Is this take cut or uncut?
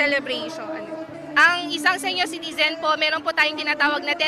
uncut